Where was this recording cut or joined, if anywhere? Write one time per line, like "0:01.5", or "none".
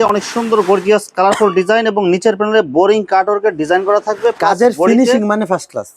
none